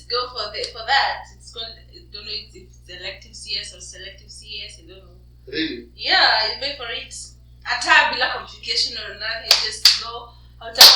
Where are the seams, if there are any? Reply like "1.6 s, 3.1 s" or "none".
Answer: none